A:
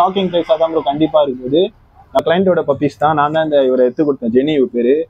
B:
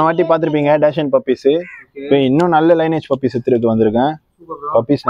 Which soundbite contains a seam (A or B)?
A